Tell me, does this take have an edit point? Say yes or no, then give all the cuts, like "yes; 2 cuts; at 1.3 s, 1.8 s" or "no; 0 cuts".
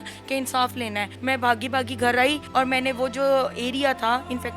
yes; 2 cuts; at 1.1 s, 2.4 s